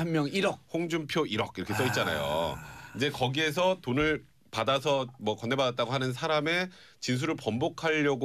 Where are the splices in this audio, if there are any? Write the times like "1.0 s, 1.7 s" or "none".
none